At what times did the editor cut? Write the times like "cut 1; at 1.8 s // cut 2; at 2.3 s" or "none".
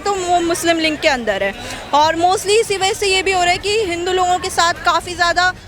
none